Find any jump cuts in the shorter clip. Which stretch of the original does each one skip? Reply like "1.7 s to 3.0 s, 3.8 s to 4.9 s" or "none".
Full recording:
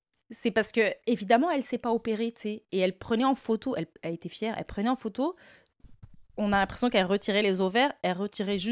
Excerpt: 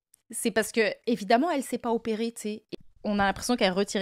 2.6 s to 6.0 s